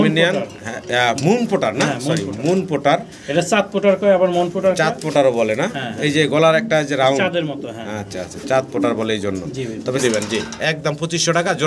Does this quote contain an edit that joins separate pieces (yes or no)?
yes